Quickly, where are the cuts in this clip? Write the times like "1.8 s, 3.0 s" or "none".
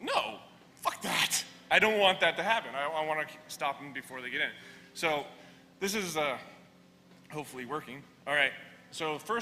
8.2 s